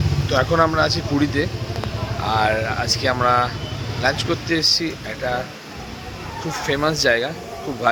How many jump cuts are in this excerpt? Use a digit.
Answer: 0